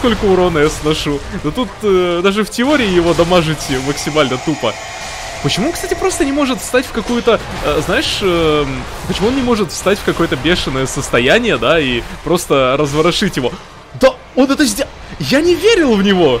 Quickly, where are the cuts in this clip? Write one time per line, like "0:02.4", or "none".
none